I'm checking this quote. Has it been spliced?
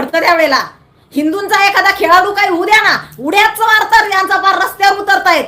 no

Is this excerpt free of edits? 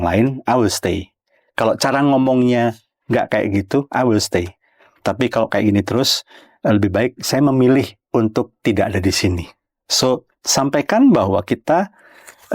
yes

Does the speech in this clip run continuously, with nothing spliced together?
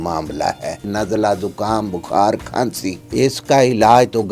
no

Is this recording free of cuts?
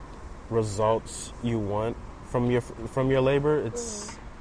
no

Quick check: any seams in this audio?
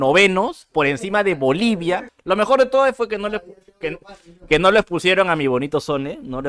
yes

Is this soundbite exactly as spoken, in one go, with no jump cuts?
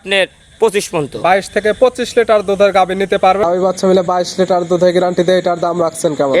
no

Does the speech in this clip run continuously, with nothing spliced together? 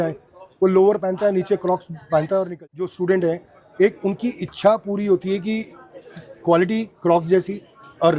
no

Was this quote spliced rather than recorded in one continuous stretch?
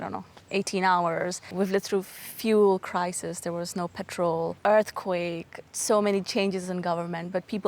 yes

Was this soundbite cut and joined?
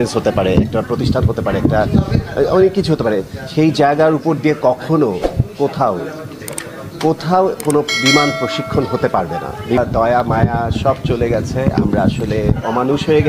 yes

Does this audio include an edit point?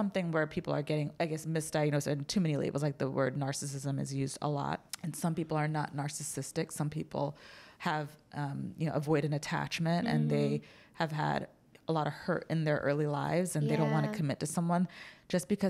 yes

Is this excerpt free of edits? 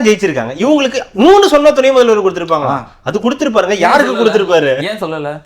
yes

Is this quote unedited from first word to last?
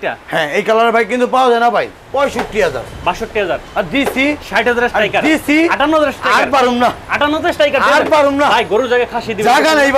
no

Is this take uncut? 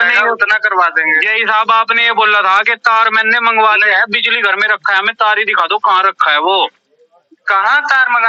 yes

